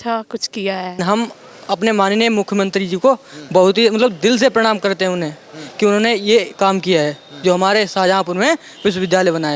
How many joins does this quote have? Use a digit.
1